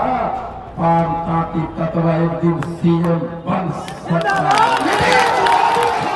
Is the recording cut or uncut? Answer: uncut